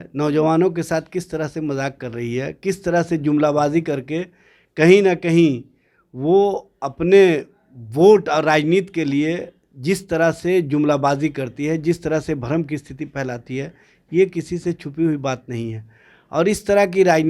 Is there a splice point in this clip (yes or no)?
no